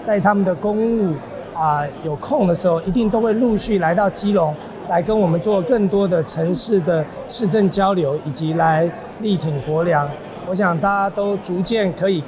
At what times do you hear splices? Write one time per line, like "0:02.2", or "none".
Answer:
none